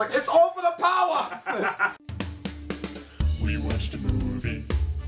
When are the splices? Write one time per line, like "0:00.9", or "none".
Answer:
0:01.9